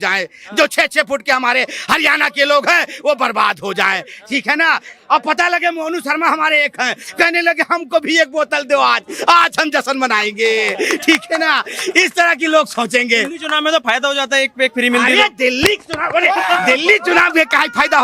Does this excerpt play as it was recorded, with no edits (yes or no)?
yes